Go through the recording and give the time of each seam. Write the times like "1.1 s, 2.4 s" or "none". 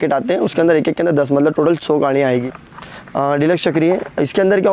2.5 s